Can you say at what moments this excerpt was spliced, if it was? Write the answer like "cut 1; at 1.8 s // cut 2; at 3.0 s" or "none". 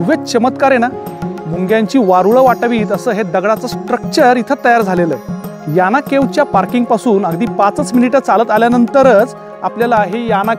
none